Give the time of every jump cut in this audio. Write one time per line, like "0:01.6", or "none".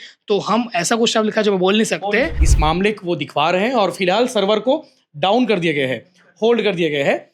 0:02.5